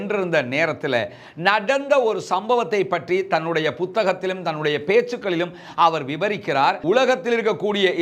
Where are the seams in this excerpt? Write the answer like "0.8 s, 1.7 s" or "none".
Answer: 6.8 s